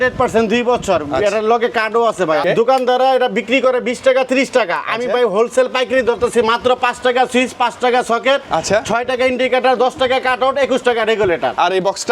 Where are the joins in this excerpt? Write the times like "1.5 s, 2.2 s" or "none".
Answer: 2.4 s